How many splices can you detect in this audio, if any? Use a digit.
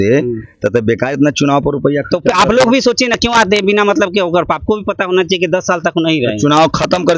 0